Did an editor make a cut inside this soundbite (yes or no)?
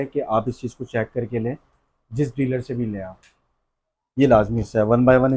no